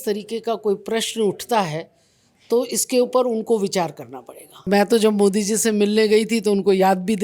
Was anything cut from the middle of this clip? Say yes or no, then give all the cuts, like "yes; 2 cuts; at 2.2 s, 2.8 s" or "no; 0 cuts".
yes; 1 cut; at 4.7 s